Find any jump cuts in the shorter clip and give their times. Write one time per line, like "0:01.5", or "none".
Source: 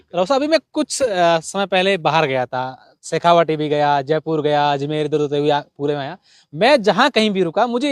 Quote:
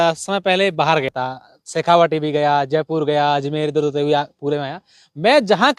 0:01.1